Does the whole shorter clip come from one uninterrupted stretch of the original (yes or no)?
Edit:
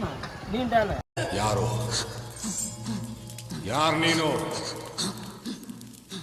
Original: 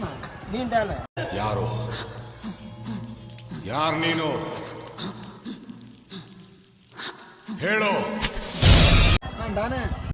yes